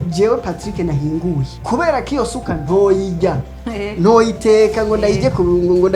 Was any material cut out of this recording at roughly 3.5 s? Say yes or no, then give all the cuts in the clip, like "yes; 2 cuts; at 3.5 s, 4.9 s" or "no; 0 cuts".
no; 1 cut; at 1.5 s